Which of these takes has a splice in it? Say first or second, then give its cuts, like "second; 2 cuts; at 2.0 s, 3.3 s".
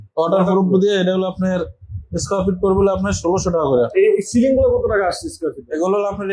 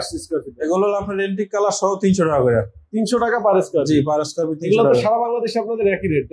first; 1 cut; at 3.9 s